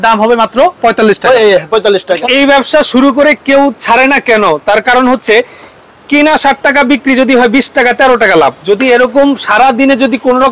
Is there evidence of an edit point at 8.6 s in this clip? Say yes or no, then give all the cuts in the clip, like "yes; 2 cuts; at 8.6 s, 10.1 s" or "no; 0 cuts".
yes; 2 cuts; at 2.2 s, 8.6 s